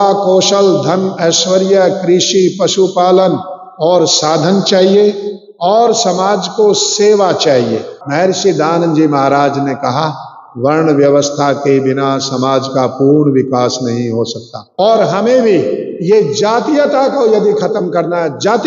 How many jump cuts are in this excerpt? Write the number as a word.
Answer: two